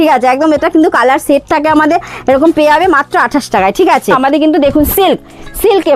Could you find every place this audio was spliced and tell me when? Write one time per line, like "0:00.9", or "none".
0:04.2

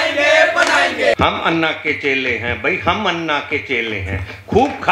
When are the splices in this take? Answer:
0:01.1

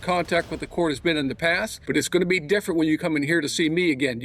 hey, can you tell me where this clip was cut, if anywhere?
0:01.7

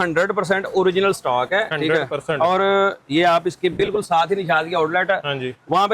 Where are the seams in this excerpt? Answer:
none

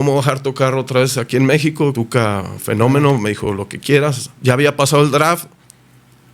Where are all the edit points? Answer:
0:02.0
0:04.3

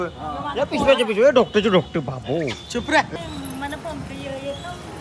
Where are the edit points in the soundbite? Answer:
0:03.1

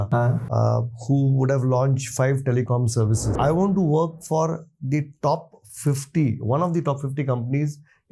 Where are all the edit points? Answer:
0:03.3

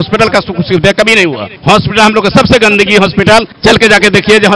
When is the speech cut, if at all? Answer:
0:01.5
0:03.5

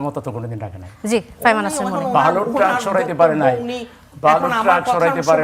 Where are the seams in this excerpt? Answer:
none

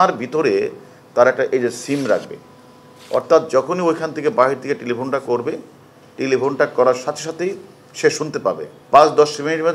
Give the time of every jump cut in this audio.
0:08.7

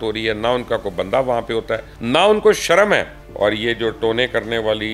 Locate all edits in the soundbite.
0:01.9
0:03.2

